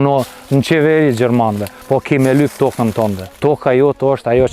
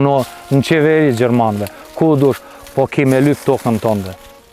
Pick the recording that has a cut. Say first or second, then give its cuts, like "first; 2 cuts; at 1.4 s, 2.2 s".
first; 2 cuts; at 1.7 s, 3.3 s